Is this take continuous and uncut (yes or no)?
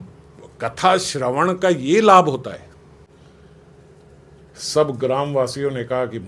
no